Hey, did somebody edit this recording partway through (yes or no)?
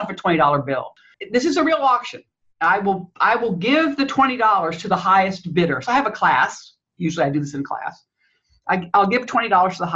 yes